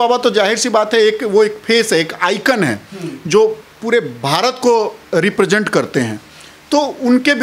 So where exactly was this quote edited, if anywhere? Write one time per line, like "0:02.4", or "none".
none